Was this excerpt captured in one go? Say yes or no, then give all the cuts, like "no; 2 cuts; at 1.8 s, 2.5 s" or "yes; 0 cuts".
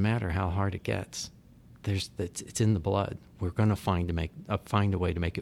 yes; 0 cuts